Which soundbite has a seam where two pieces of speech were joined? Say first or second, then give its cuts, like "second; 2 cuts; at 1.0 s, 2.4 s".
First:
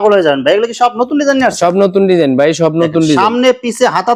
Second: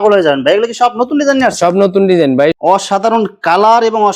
second; 1 cut; at 2.6 s